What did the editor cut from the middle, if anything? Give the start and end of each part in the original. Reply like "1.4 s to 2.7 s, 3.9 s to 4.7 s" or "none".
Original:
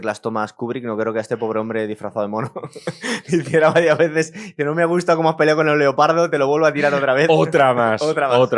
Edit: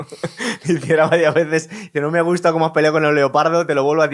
none